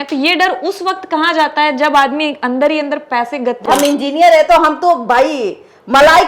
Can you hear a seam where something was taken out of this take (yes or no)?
yes